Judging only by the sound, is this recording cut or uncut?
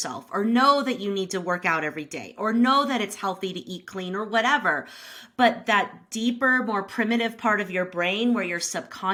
uncut